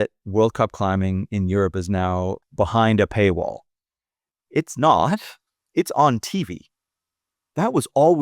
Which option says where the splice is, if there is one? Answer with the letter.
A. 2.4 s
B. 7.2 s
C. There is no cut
A